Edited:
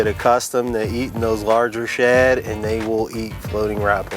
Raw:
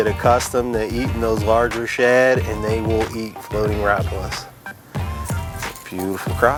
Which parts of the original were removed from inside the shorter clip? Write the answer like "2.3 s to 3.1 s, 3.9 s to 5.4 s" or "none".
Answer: none